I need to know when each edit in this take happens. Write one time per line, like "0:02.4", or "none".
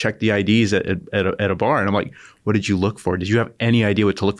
none